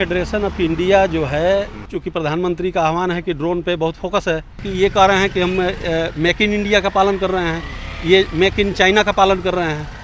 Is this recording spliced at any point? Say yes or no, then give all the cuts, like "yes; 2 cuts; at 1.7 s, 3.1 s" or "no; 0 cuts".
yes; 2 cuts; at 1.8 s, 4.6 s